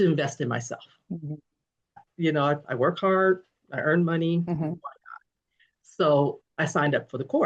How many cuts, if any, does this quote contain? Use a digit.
2